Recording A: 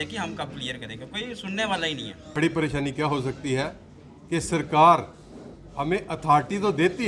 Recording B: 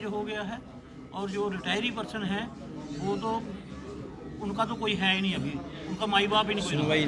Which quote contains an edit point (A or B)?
A